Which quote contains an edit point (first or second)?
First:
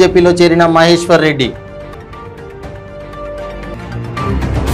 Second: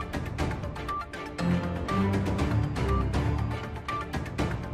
second